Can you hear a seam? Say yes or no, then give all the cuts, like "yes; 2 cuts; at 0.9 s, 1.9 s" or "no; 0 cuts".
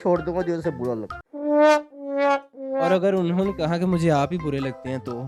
no; 0 cuts